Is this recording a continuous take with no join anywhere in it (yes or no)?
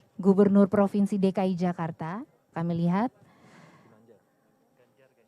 no